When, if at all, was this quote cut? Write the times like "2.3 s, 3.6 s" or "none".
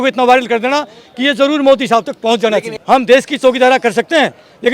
2.7 s